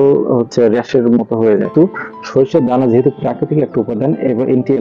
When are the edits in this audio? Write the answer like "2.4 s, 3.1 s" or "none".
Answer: 1.7 s